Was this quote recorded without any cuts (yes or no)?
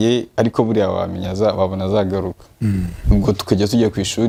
yes